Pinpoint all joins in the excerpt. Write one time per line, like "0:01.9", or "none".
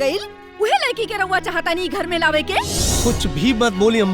0:02.8